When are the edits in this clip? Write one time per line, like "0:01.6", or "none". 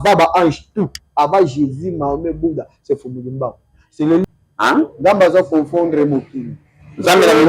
0:04.2